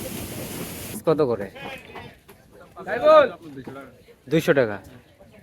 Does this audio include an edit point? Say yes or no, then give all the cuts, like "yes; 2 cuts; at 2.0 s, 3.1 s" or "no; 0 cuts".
yes; 1 cut; at 1.0 s